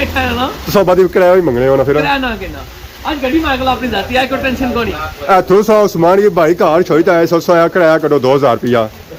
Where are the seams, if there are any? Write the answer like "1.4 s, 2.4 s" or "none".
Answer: none